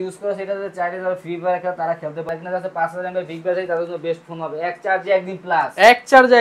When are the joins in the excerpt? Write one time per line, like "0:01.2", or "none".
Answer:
0:02.3